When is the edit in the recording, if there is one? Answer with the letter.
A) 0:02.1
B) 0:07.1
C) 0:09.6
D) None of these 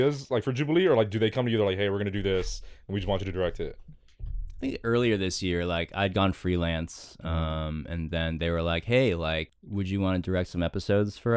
C